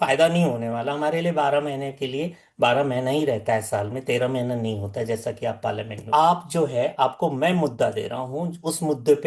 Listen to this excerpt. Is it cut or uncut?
cut